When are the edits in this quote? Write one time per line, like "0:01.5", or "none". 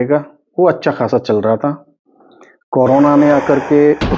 none